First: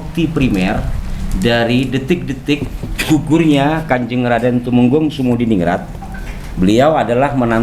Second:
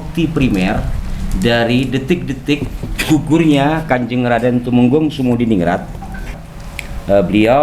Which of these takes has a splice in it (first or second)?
second